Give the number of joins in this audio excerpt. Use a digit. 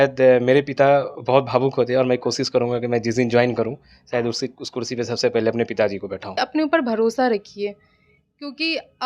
1